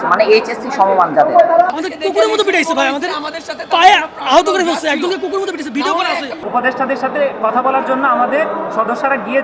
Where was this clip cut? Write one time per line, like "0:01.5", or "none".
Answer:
0:01.7
0:06.3